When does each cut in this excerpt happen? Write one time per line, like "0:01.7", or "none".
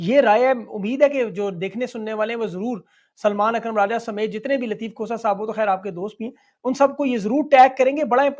none